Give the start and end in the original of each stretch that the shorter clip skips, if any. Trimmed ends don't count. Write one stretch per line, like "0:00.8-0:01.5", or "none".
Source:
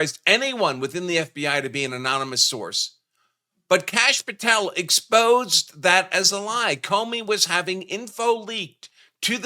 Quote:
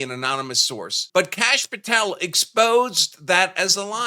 0:02.8-0:03.5